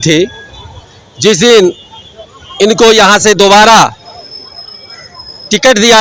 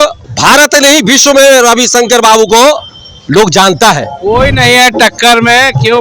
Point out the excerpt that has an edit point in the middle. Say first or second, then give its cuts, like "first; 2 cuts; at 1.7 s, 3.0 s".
second; 1 cut; at 4.1 s